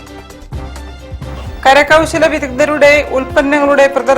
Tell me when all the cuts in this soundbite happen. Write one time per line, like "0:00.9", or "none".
0:01.0